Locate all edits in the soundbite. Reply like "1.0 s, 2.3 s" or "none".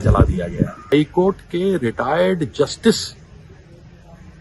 0.9 s